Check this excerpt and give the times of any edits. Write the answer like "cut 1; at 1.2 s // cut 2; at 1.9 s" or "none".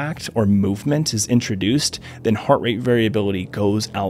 none